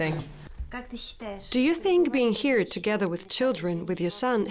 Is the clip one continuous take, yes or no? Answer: no